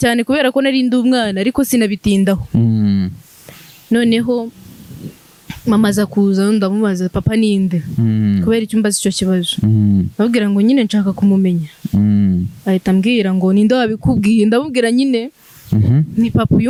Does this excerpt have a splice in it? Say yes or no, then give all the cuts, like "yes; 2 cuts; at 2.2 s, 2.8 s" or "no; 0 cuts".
no; 0 cuts